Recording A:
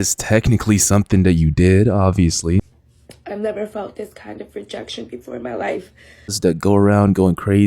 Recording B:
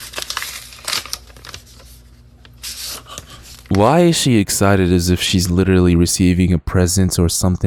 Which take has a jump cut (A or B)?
A